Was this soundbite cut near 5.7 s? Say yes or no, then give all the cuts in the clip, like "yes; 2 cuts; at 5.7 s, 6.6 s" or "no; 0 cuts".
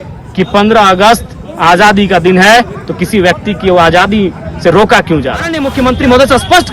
yes; 1 cut; at 5.7 s